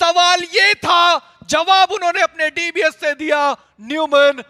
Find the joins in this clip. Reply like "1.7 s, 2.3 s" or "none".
none